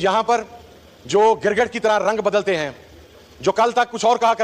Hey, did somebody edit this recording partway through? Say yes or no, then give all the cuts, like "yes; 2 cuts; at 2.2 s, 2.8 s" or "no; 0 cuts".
no; 0 cuts